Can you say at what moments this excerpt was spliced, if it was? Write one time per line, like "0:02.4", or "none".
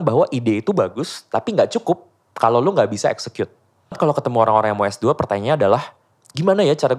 0:04.0